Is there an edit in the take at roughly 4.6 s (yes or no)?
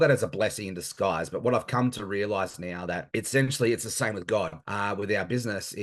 yes